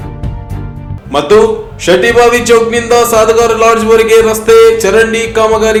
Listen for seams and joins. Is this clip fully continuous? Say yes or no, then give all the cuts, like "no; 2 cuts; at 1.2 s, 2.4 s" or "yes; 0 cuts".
yes; 0 cuts